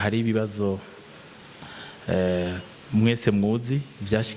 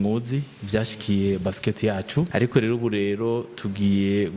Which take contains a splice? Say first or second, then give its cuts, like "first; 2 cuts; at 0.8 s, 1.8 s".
second; 1 cut; at 2.3 s